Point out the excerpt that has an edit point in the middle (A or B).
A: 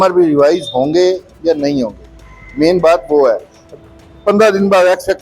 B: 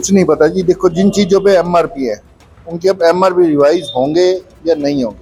A